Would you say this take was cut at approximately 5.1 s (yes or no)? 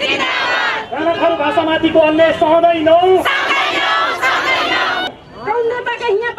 yes